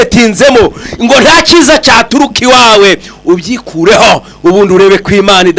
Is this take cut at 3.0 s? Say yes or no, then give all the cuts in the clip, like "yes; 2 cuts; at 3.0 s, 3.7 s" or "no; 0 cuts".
no; 0 cuts